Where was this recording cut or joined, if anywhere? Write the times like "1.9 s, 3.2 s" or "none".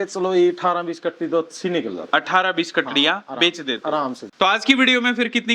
4.2 s